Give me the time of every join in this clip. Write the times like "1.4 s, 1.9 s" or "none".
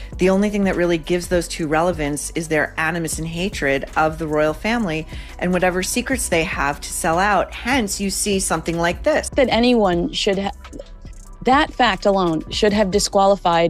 9.3 s

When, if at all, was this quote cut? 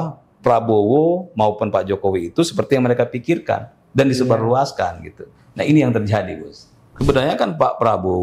7.0 s

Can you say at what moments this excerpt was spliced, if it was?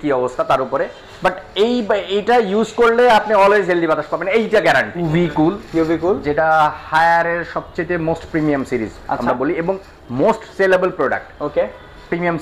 5.0 s

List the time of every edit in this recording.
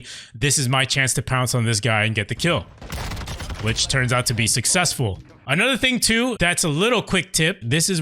5.4 s, 6.4 s

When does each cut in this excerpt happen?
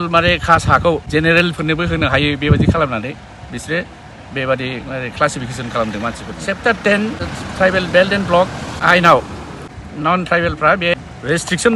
6.3 s

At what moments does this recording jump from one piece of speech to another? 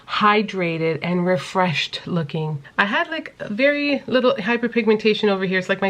2.6 s

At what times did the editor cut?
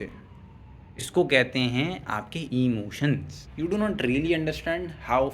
3.4 s

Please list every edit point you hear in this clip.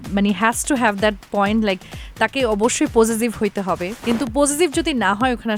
3.9 s

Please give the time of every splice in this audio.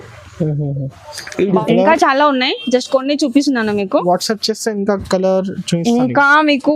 1.6 s

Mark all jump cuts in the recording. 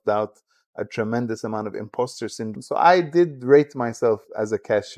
2.5 s

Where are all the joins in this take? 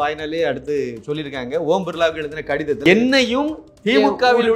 2.8 s

